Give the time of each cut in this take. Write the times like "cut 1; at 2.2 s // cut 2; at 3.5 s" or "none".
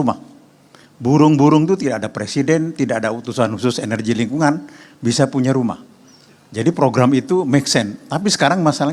none